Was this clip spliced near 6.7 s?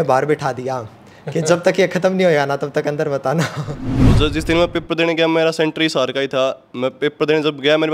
no; 1 cut; at 4.0 s

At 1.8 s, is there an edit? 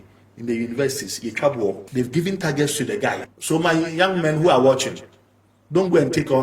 yes; 2 cuts; at 1.8 s, 3.2 s

